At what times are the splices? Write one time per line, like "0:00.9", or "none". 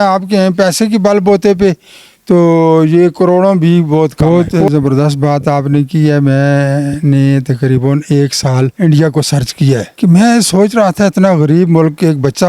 0:04.2